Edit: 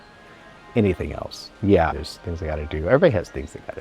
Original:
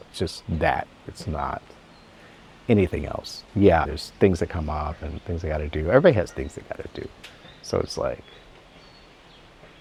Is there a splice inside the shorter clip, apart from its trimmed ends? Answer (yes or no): yes